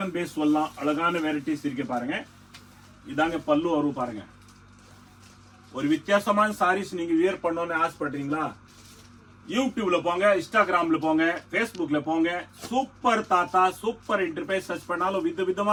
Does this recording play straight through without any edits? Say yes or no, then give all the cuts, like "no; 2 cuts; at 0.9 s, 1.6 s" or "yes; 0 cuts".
yes; 0 cuts